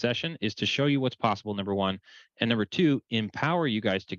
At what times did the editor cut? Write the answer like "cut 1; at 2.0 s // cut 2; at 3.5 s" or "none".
none